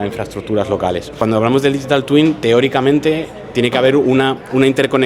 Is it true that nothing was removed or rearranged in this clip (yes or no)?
no